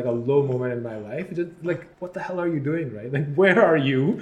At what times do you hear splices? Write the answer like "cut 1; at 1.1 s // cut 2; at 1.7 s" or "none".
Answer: cut 1; at 1.9 s